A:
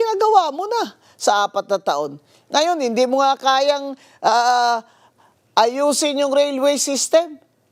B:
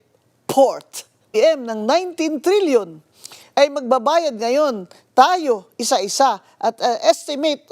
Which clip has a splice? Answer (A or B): B